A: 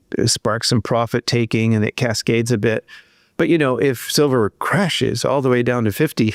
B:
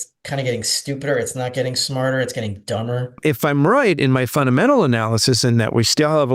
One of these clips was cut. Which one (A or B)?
B